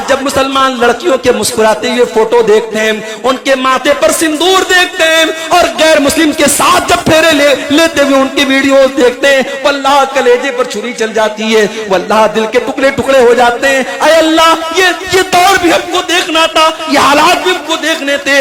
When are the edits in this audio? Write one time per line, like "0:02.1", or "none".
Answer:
none

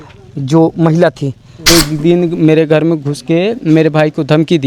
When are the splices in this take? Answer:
0:01.5

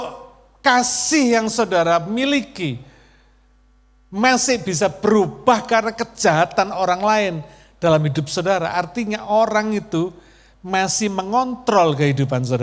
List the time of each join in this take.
none

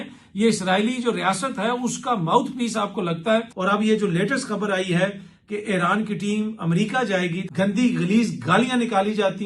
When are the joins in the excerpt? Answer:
0:03.5
0:07.4

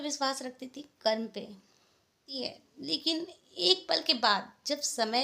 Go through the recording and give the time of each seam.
0:02.3

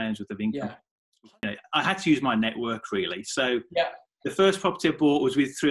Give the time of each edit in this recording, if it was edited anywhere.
0:01.2

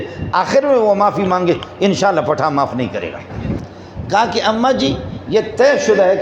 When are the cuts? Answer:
0:03.4

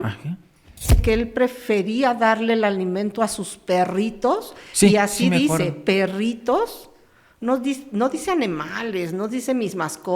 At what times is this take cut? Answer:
0:01.0

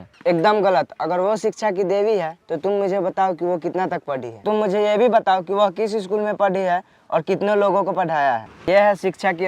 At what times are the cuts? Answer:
0:08.5

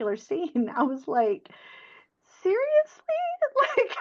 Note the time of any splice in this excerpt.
none

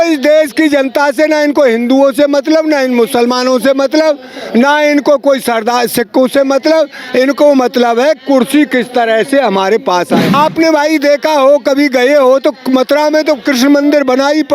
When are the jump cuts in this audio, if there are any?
0:10.3

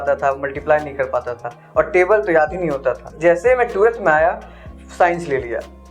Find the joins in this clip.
0:03.1

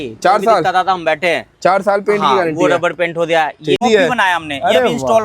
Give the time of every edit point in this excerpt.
0:03.8

